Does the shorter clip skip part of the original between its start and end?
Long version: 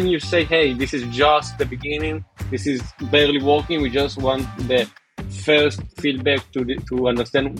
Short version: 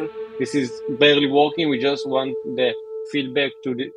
yes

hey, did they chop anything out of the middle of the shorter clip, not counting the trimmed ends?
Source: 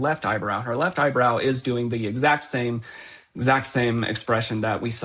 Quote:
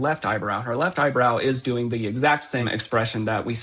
yes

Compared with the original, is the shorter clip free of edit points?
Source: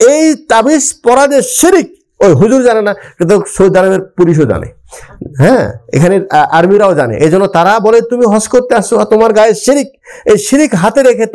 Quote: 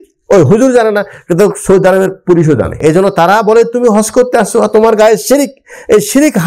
no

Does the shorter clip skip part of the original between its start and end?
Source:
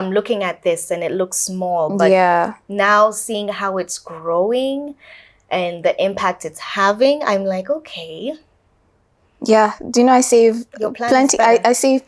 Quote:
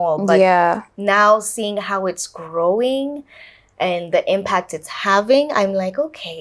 no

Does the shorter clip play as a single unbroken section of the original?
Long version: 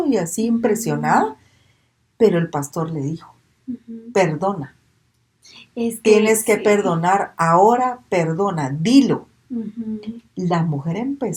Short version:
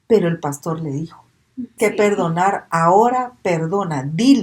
no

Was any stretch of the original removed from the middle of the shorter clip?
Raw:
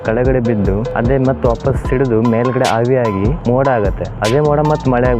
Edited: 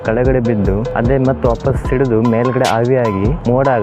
no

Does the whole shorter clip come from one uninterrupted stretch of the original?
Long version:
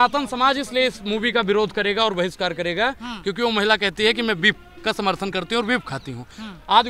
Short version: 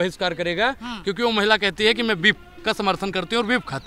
yes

